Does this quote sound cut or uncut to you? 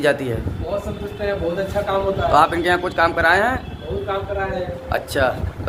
uncut